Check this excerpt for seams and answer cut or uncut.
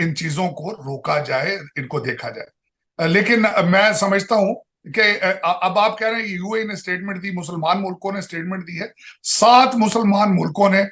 uncut